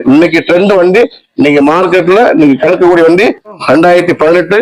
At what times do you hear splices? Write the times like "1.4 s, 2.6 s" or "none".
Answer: 3.6 s